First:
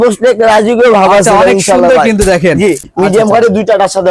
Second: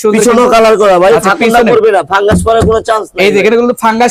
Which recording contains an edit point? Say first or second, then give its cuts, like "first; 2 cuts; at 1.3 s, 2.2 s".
first; 1 cut; at 2.9 s